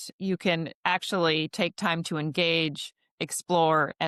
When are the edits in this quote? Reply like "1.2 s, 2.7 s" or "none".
none